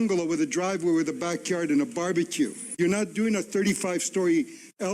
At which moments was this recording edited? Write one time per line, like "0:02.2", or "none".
0:02.6